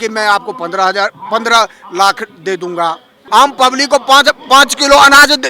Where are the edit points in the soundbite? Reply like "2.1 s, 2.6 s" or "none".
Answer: 3.1 s